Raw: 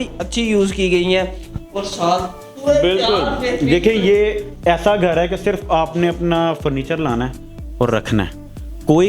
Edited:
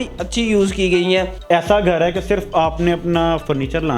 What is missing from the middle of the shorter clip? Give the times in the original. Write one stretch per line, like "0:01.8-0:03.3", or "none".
0:01.4-0:04.5